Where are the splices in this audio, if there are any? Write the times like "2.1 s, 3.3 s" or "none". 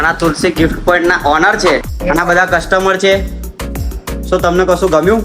1.9 s